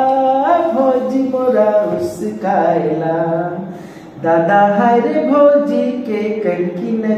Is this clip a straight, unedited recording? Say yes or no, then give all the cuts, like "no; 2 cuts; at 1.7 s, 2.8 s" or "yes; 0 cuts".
yes; 0 cuts